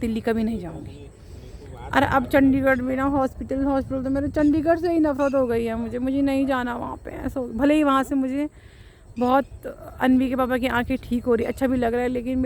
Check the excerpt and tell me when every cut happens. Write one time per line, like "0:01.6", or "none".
none